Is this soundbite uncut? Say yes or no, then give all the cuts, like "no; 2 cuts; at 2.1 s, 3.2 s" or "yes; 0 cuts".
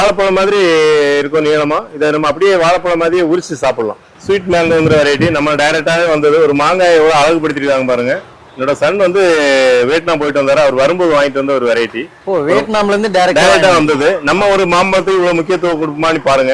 no; 1 cut; at 4.1 s